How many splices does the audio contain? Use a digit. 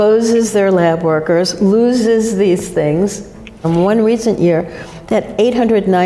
1